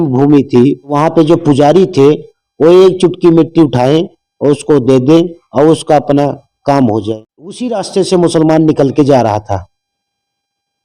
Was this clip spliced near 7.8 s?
yes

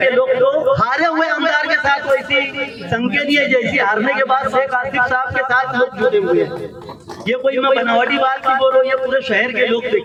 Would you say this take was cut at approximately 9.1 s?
no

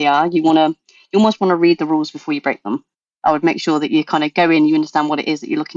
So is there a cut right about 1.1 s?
no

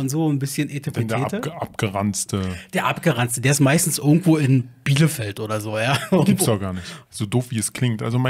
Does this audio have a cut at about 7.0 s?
yes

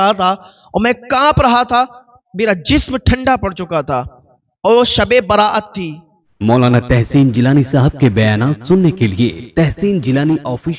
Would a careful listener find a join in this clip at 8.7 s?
no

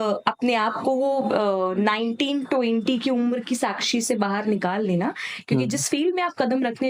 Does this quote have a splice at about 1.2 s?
no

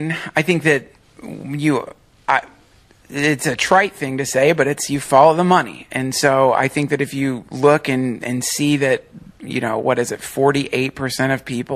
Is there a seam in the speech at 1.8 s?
yes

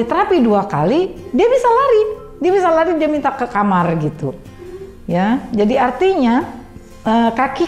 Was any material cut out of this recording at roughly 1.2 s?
no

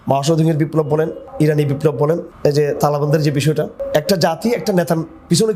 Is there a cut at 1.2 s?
yes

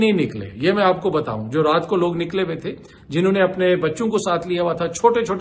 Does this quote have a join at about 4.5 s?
no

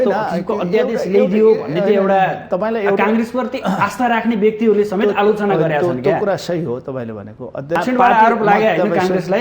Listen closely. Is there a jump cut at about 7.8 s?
yes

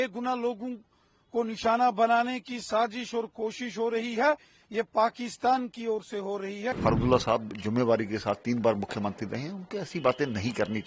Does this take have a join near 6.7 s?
yes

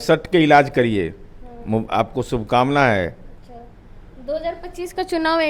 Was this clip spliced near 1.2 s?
no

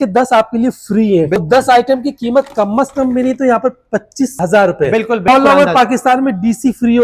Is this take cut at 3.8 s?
no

